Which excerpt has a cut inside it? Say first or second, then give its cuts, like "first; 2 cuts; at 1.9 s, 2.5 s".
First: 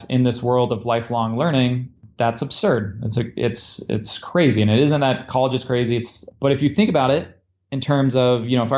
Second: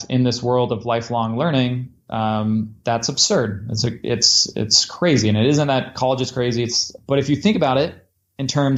first; 1 cut; at 2.1 s